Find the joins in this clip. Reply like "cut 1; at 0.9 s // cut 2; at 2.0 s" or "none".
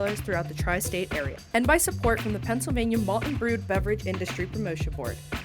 cut 1; at 1.4 s

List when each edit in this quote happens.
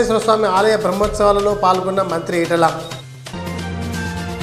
none

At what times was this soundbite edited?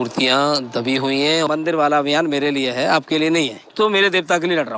cut 1; at 1.5 s // cut 2; at 3.7 s

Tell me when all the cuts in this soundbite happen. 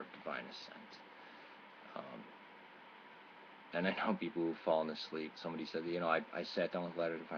cut 1; at 3.2 s

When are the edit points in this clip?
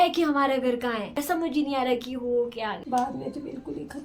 cut 1; at 1.2 s // cut 2; at 2.8 s

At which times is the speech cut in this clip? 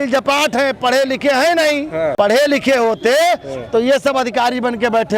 cut 1; at 2.1 s

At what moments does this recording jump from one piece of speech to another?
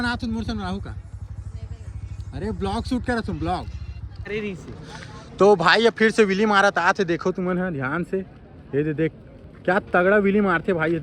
cut 1; at 4.2 s

